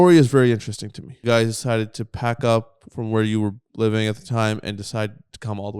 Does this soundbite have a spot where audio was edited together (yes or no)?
yes